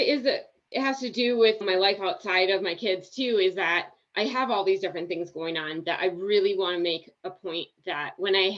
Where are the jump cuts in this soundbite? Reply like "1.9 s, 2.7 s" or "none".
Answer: 1.6 s